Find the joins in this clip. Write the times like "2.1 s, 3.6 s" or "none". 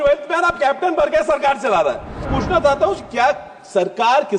2.3 s

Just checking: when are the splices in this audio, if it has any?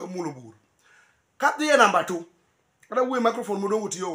none

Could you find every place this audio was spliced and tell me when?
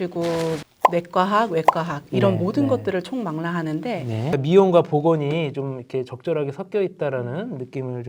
4.3 s

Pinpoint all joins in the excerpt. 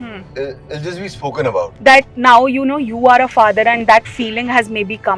1.7 s

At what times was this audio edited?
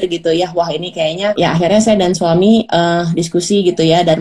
1.4 s

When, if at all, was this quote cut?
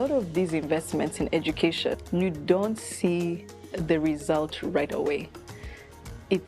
2.0 s

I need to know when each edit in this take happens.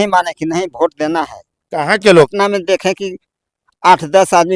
2.3 s

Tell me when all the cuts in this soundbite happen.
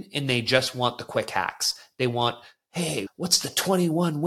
3.1 s

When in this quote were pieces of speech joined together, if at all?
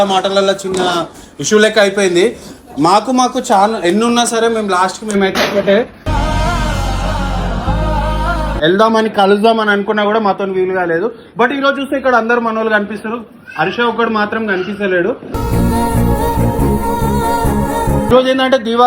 8.6 s, 18.1 s

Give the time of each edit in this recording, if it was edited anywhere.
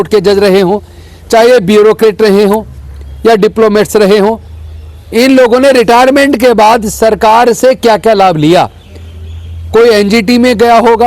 none

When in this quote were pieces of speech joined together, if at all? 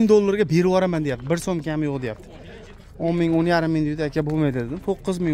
none

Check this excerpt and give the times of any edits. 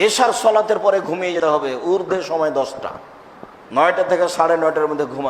1.4 s

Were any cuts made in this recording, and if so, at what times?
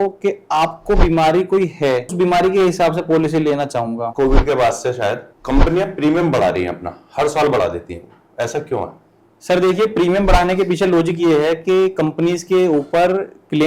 2.1 s, 4.1 s

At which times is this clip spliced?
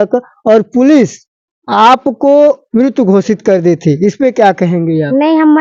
none

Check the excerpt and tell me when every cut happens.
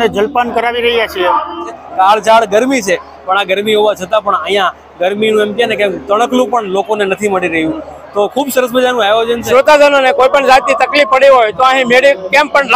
1.8 s, 9.4 s

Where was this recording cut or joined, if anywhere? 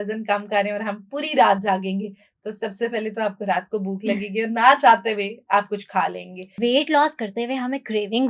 6.5 s

